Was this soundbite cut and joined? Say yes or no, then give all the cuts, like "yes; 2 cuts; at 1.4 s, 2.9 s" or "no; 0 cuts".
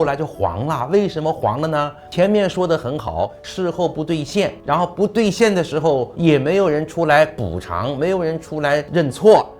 no; 0 cuts